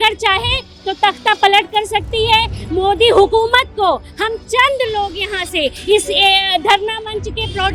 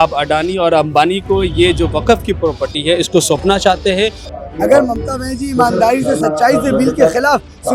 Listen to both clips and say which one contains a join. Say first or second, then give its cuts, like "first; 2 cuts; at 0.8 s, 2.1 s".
second; 1 cut; at 4.2 s